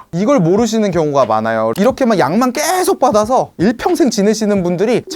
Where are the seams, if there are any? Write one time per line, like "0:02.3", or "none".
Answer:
0:01.7